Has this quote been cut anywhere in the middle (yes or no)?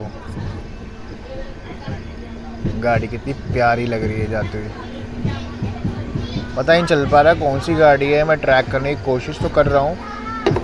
no